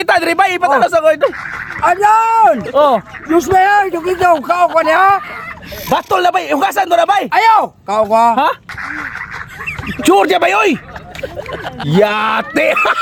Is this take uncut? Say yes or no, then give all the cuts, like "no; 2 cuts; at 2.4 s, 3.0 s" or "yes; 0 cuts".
yes; 0 cuts